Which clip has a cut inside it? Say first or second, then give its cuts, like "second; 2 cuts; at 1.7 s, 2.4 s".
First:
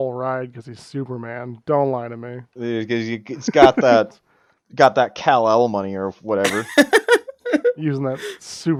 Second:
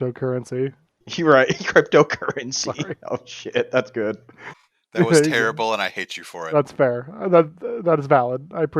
second; 1 cut; at 4.4 s